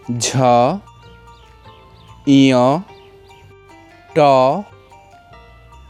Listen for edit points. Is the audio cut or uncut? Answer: uncut